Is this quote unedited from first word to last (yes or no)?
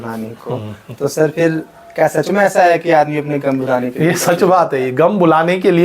yes